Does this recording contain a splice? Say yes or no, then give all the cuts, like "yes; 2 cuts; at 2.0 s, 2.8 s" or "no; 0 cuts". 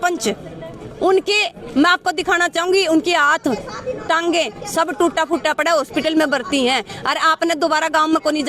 no; 0 cuts